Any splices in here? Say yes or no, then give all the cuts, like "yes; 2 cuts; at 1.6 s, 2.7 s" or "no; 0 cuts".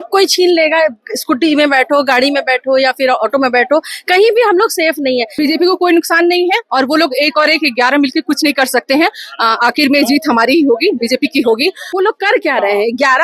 yes; 2 cuts; at 5.3 s, 11.8 s